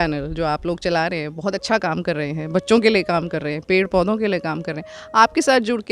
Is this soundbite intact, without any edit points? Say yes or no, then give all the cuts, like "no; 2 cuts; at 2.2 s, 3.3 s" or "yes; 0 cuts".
yes; 0 cuts